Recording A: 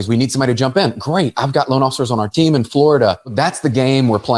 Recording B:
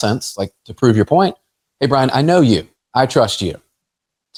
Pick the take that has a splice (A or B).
A